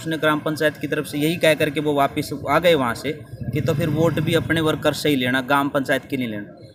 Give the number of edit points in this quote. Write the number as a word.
zero